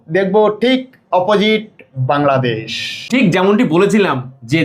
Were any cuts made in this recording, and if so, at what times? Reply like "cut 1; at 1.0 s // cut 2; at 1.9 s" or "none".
none

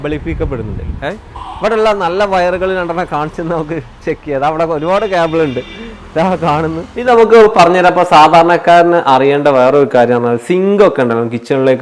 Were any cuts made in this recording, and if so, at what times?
cut 1; at 1.4 s // cut 2; at 7.1 s

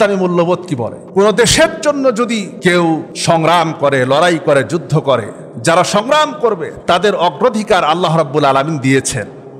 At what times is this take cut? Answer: cut 1; at 1.0 s // cut 2; at 2.5 s // cut 3; at 3.1 s

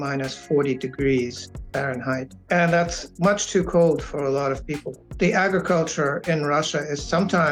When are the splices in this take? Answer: cut 1; at 2.3 s // cut 2; at 5.0 s

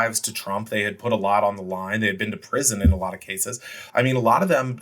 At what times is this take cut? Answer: cut 1; at 3.7 s

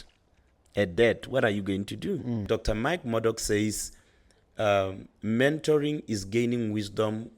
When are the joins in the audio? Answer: cut 1; at 2.4 s

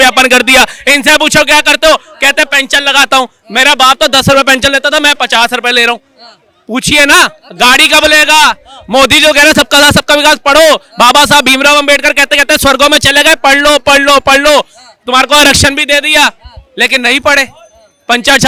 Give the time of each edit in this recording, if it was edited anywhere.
none

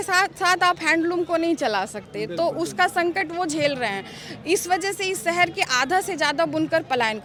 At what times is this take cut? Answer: none

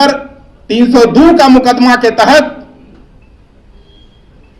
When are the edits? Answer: none

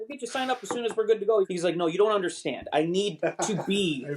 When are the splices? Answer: cut 1; at 1.5 s

